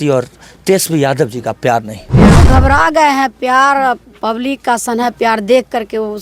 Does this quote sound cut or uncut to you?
cut